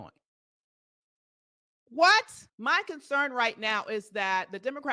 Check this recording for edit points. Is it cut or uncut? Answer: cut